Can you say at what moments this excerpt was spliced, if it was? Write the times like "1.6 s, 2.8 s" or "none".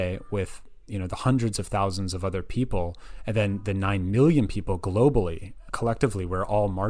5.7 s

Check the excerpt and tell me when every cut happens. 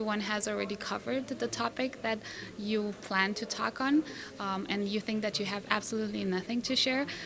none

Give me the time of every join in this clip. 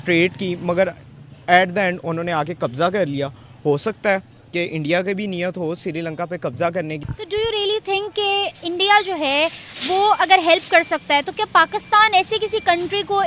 7.0 s

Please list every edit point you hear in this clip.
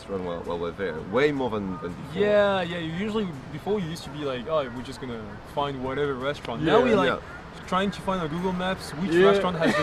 none

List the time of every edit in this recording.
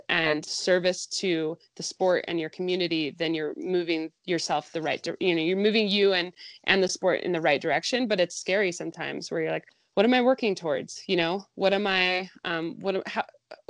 4.1 s, 9.8 s

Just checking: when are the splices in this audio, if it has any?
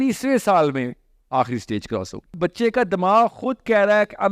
2.3 s

